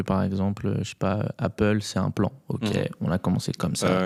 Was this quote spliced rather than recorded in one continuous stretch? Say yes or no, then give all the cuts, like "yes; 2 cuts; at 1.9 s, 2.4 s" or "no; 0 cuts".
no; 0 cuts